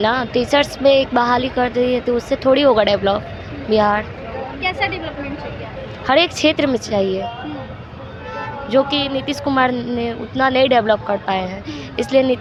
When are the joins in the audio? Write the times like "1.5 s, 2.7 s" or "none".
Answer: none